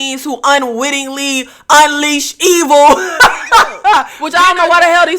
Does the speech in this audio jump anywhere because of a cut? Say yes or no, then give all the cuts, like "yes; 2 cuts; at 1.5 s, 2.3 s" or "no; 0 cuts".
yes; 1 cut; at 4.2 s